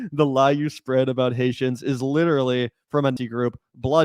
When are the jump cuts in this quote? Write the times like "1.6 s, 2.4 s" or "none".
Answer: 3.2 s